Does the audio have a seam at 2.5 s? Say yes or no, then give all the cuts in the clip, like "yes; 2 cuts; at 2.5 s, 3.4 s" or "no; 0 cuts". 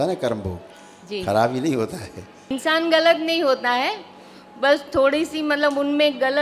yes; 1 cut; at 2.5 s